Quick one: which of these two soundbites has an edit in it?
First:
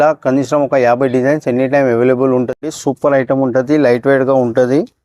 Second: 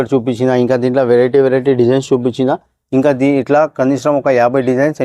first; 1 cut; at 2.6 s

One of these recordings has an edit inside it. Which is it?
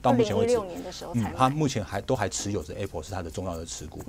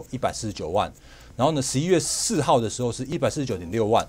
second; 1 cut; at 3.1 s

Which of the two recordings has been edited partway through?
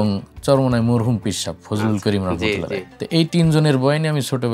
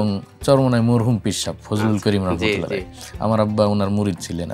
first; 1 cut; at 2.9 s

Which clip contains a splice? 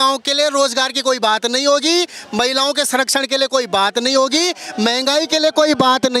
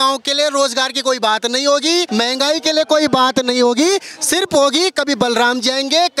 second; 1 cut; at 2.1 s

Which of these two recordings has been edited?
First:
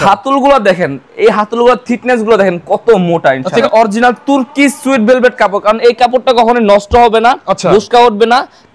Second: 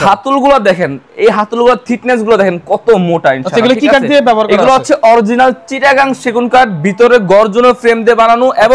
first; 1 cut; at 3.6 s

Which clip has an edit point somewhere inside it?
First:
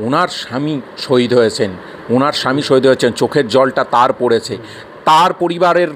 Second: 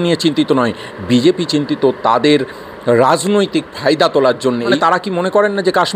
second; 1 cut; at 4.7 s

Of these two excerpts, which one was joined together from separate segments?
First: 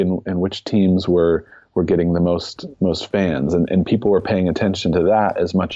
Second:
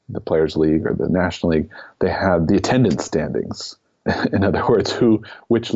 second; 2 cuts; at 2.4 s, 4.0 s

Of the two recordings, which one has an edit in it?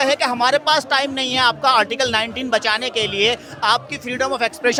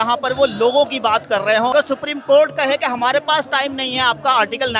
second; 1 cut; at 1.7 s

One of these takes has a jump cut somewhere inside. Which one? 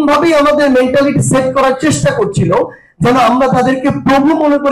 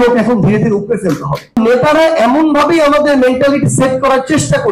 second; 1 cut; at 1.6 s

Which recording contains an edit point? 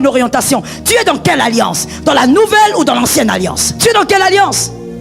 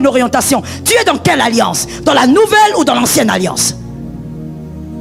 first; 1 cut; at 3.7 s

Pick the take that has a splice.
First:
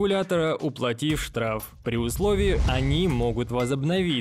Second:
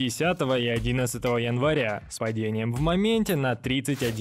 first; 1 cut; at 2.6 s

